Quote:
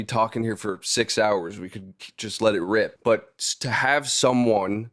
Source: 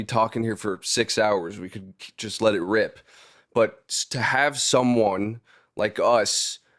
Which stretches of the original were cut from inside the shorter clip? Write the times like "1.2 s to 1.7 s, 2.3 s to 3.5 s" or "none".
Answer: 2.9 s to 3.5 s